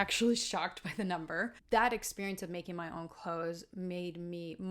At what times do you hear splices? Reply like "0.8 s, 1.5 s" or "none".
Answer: 1.6 s

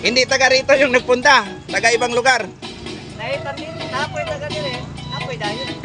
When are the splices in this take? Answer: none

